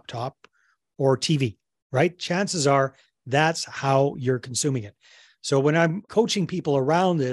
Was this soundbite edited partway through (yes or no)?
yes